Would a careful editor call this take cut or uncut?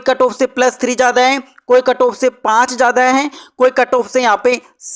uncut